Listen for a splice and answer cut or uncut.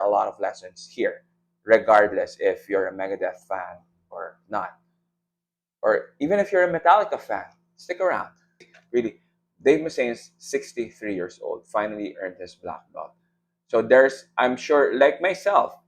cut